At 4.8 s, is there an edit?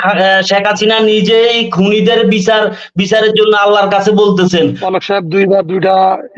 yes; 1 cut; at 4.8 s

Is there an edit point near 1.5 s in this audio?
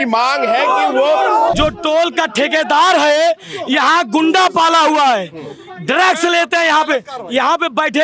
yes; 1 cut; at 1.5 s

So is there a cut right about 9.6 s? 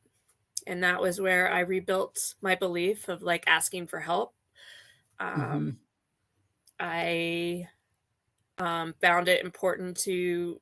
no; 0 cuts

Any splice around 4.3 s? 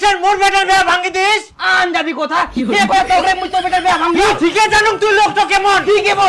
yes; 1 cut; at 4.3 s

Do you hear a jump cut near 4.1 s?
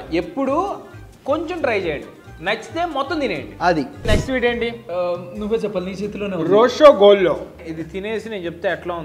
yes; 2 cuts; at 4.1 s, 7.7 s

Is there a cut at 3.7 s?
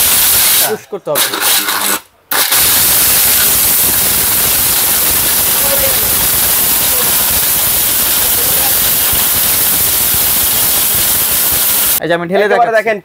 no; 1 cut; at 11.8 s

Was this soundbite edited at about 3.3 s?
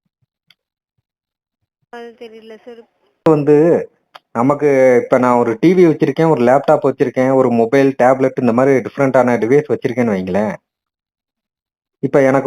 yes; 1 cut; at 3.3 s

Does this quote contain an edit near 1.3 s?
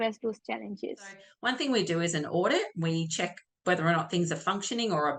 yes; 1 cut; at 1.3 s

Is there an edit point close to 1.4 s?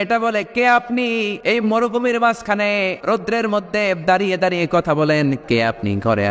yes; 3 cuts; at 1.4 s, 3.0 s, 5.4 s

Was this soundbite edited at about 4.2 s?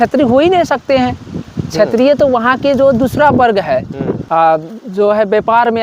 yes; 1 cut; at 4.2 s

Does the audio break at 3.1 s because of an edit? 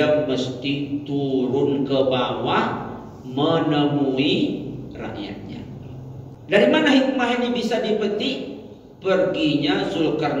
no; 1 cut; at 6.3 s

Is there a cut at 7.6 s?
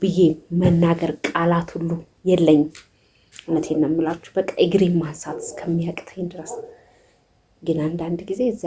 no; 0 cuts

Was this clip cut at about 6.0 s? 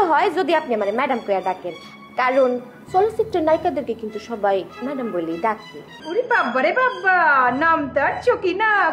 yes; 1 cut; at 6.0 s

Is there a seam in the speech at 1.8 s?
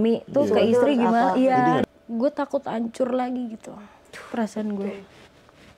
yes; 1 cut; at 1.8 s

